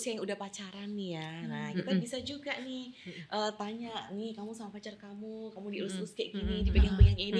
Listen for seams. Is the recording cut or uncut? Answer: uncut